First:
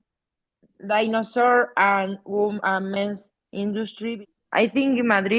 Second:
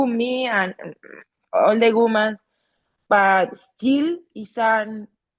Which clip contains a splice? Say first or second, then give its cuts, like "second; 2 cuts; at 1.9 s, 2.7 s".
first; 1 cut; at 4.1 s